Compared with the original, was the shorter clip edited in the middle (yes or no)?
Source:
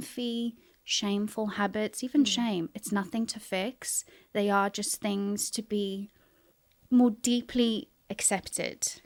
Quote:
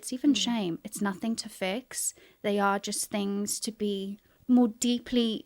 yes